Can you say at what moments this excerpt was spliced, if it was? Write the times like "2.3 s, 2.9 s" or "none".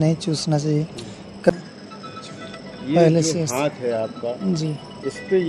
1.5 s